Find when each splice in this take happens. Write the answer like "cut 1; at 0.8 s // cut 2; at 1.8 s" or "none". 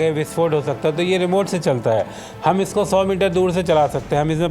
none